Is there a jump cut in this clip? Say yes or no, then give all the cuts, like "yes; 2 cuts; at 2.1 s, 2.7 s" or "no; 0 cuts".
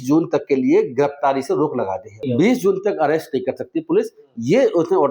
yes; 1 cut; at 2.2 s